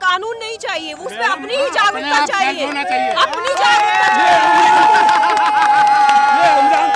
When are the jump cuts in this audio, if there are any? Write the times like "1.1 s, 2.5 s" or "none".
none